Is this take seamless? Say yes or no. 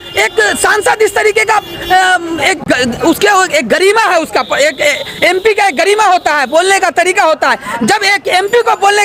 yes